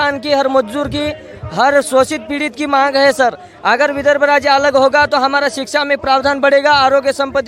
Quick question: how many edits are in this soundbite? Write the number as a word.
zero